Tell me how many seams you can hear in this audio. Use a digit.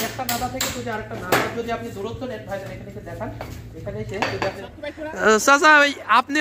1